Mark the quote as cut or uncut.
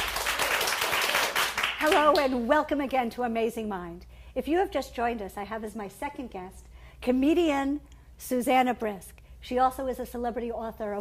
cut